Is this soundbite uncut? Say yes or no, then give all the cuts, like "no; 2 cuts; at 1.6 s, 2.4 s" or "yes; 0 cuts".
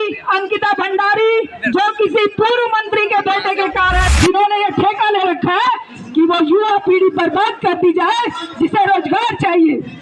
no; 1 cut; at 4.1 s